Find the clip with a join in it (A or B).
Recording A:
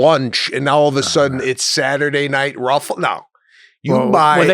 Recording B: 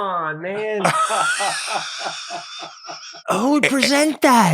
B